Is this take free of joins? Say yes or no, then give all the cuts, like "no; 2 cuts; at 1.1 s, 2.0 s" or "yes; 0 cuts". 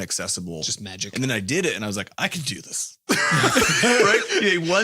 no; 1 cut; at 1.0 s